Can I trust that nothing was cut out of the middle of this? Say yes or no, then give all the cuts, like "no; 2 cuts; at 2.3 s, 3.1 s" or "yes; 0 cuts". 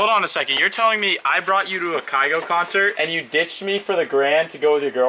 no; 1 cut; at 2.9 s